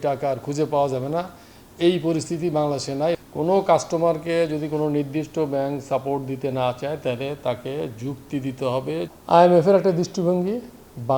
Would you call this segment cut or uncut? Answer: cut